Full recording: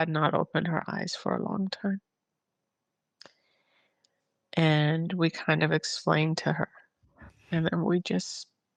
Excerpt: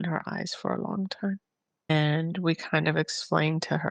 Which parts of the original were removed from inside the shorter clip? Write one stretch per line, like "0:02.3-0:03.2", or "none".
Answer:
0:02.5-0:04.6